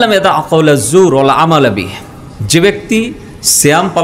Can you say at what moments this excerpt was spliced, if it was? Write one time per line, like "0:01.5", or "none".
none